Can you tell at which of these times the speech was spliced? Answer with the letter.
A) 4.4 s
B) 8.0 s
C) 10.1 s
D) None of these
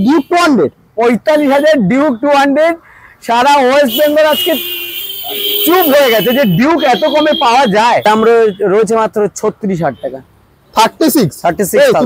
B